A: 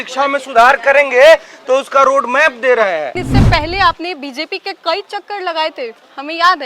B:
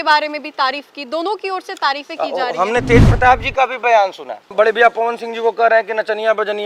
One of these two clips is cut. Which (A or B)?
A